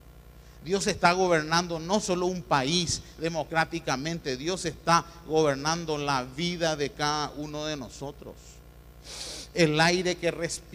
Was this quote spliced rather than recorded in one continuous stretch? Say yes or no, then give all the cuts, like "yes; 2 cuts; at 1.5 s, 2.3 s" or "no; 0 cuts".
yes; 1 cut; at 2.5 s